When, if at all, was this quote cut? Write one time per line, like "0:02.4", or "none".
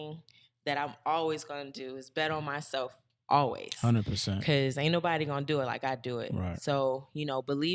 none